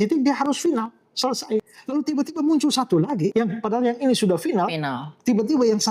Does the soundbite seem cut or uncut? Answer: cut